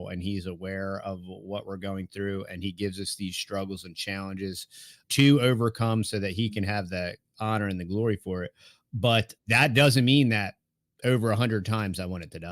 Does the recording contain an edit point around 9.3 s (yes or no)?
yes